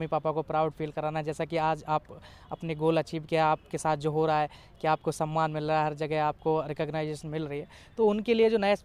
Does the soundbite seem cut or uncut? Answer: uncut